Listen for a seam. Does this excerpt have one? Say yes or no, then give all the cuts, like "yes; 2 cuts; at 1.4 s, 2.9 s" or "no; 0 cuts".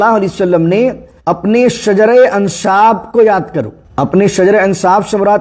yes; 2 cuts; at 1.1 s, 3.8 s